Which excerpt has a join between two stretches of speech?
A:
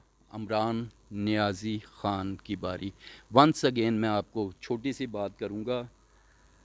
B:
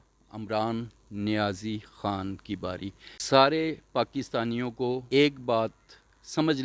B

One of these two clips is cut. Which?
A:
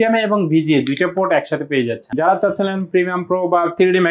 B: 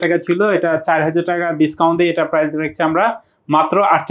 A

